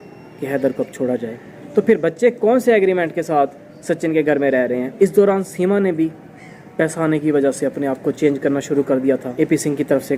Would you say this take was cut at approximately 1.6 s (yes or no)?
yes